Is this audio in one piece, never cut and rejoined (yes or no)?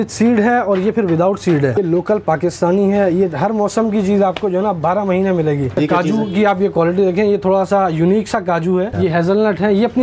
no